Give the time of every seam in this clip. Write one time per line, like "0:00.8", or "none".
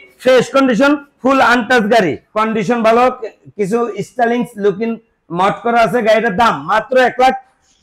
0:02.2